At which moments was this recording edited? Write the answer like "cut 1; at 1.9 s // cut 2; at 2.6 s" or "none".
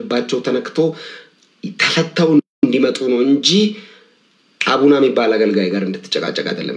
cut 1; at 2.5 s